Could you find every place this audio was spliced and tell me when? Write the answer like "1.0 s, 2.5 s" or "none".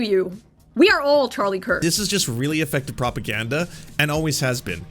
1.8 s